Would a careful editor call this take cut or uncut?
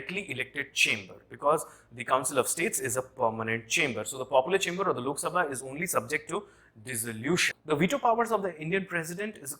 cut